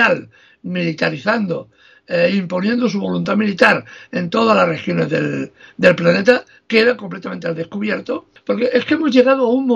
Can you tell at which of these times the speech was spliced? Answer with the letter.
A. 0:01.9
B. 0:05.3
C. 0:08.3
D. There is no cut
C